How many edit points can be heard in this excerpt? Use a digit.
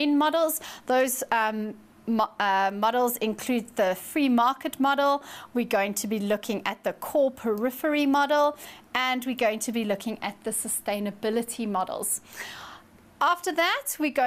0